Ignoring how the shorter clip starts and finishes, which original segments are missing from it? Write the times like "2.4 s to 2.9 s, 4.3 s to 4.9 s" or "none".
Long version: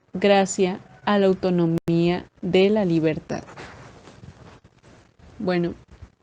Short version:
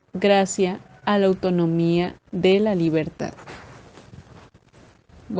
1.8 s to 1.9 s